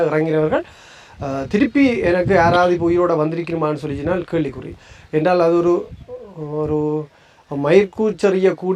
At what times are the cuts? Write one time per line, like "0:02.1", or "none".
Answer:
none